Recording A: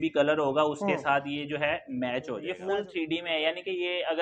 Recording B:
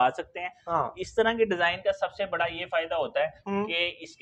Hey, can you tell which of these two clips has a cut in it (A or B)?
A